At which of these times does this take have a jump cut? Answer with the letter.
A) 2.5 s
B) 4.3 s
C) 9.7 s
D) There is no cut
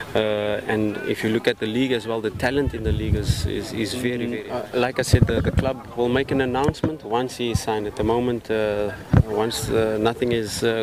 B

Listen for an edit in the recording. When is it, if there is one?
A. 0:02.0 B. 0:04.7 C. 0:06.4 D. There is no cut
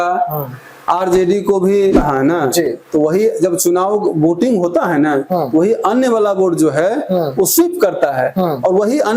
A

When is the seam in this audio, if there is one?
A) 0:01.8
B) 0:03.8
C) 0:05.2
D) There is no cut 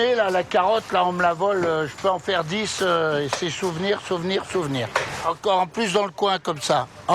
C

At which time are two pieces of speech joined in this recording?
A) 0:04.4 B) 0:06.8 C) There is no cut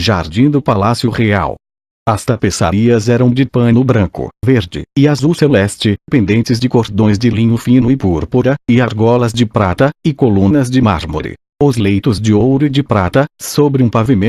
C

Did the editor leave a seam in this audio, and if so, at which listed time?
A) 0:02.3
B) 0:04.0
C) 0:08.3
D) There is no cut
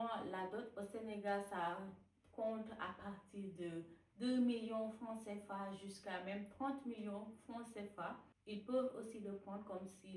C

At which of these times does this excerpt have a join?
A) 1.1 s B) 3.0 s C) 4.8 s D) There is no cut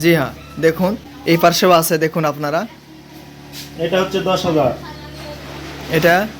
A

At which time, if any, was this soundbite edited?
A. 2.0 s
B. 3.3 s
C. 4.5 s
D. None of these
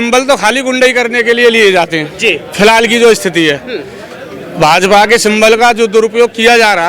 D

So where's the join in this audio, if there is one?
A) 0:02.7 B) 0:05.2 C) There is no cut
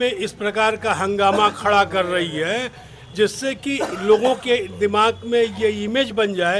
C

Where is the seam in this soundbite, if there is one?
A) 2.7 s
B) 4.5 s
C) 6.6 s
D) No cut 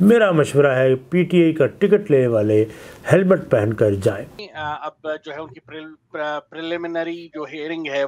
B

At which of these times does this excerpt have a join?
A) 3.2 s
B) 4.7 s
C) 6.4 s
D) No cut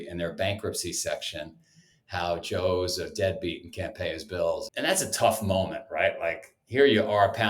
B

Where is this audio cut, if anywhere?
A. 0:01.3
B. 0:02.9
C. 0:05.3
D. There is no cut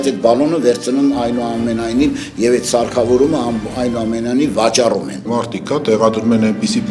C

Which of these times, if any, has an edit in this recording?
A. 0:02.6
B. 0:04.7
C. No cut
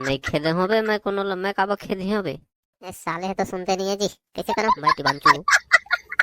B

